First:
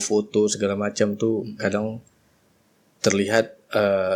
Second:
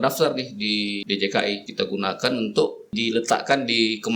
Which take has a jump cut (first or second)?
second